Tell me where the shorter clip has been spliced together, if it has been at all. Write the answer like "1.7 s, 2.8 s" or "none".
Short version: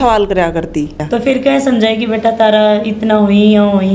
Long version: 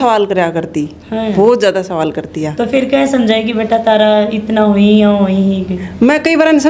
1.0 s